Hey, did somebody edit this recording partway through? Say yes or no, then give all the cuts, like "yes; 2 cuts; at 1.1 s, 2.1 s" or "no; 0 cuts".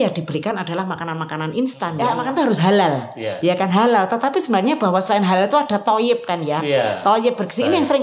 yes; 1 cut; at 1.9 s